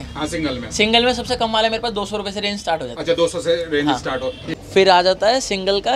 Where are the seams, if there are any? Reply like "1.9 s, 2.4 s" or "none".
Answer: 4.5 s